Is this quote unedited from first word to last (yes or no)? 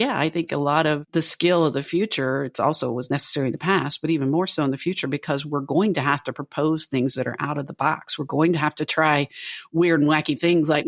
no